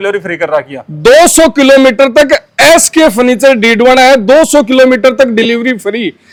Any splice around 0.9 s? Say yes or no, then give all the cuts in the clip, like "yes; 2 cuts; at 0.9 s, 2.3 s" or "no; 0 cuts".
no; 0 cuts